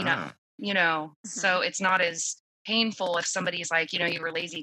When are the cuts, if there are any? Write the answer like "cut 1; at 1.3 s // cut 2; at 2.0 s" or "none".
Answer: none